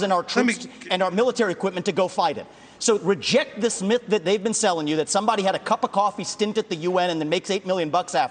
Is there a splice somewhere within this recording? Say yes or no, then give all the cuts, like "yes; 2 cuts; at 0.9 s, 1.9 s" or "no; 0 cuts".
no; 0 cuts